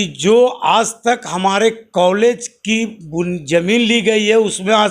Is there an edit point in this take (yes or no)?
no